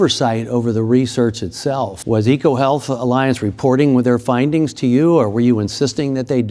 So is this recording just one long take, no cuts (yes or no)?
no